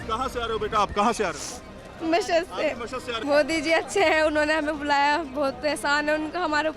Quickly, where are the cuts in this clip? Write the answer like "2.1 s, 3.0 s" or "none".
3.2 s

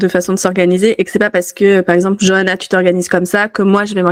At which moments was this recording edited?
none

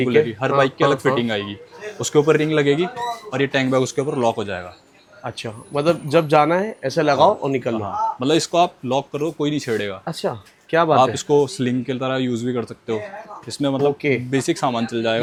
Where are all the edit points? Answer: none

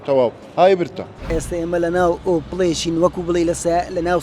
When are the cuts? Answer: 1.3 s

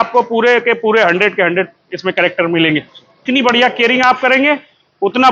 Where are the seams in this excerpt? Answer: 3.2 s

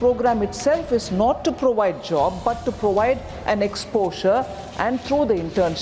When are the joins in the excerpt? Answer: none

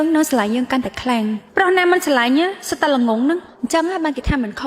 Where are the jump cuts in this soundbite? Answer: 3.5 s

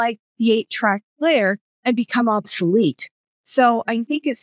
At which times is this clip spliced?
none

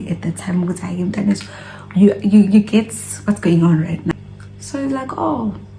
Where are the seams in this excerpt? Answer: 4.1 s

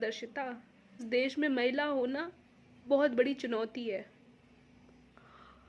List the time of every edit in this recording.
1.0 s

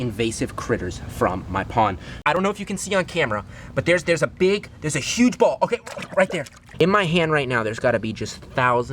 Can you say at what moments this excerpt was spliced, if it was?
2.3 s, 6.9 s

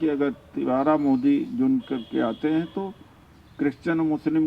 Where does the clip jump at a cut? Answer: none

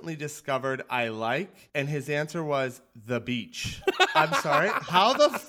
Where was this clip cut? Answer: 3.8 s

